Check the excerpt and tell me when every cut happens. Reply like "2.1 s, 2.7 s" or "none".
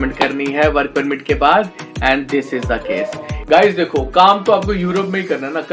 3.3 s

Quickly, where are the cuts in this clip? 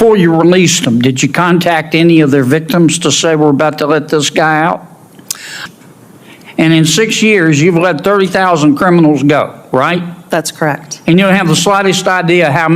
5.6 s

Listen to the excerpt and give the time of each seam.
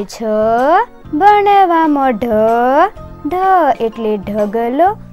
none

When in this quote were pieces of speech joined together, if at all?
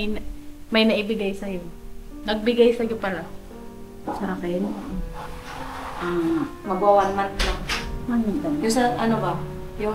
none

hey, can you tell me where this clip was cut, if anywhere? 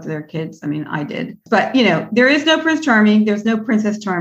none

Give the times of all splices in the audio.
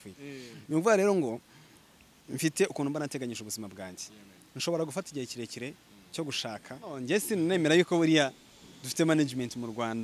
7.0 s

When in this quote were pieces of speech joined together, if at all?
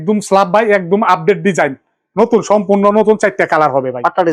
none

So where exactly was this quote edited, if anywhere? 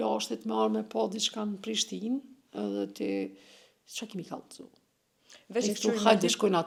none

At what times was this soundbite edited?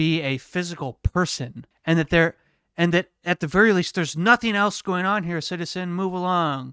1.6 s

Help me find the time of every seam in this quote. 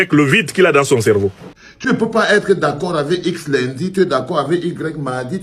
1.9 s

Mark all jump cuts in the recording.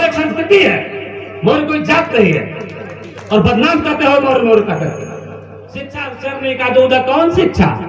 5.9 s

